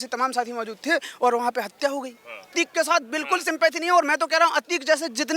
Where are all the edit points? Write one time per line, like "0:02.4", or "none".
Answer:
0:02.5